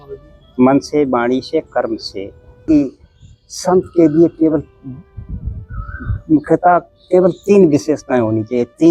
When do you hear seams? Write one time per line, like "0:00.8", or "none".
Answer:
0:02.6